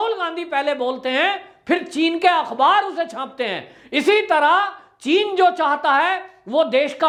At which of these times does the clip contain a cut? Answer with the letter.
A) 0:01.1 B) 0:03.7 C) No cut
C